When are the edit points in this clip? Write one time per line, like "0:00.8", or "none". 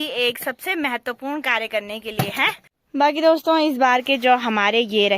0:02.7